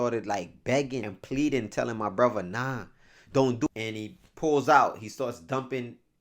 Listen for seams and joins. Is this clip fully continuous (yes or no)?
no